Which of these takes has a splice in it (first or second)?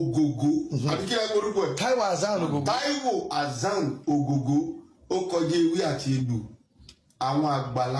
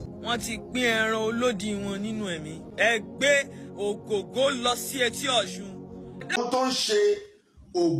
second